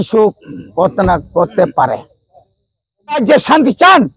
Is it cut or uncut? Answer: cut